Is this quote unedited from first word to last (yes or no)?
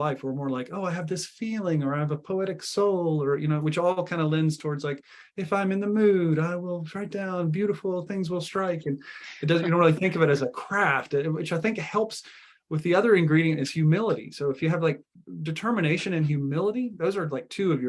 yes